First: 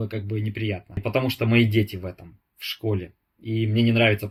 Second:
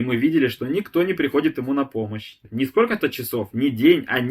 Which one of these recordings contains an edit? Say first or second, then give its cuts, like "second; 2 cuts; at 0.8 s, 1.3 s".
second; 1 cut; at 2.4 s